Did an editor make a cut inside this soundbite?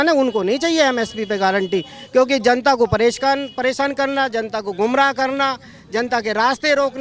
no; 0 cuts

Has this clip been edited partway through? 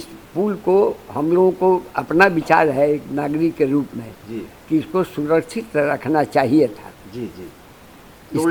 no; 0 cuts

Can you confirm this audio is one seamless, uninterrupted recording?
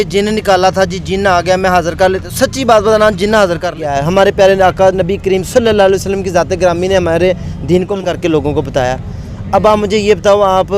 no; 2 cuts; at 3.9 s, 8.1 s

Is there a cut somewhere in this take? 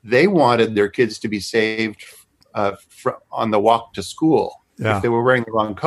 no; 0 cuts

